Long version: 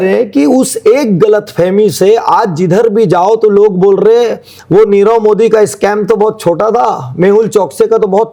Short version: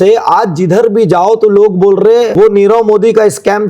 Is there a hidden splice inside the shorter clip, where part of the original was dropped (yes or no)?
yes